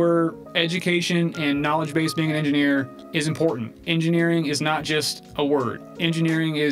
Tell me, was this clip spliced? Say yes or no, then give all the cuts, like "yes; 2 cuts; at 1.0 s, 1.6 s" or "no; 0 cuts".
no; 0 cuts